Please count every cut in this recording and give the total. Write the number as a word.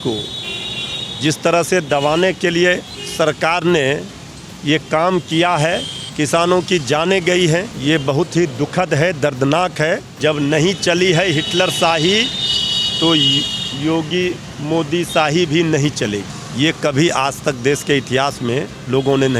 five